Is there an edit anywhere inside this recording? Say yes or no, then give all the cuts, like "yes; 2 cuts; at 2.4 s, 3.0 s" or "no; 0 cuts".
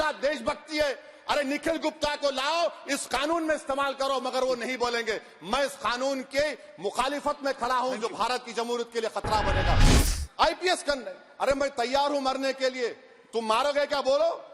yes; 1 cut; at 9.9 s